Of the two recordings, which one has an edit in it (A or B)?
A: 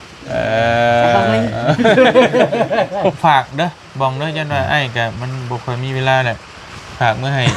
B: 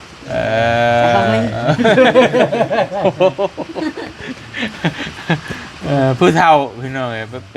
A